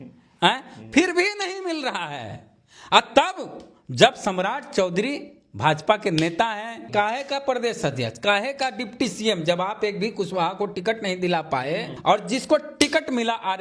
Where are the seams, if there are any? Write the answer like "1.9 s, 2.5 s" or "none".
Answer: 6.8 s, 11.9 s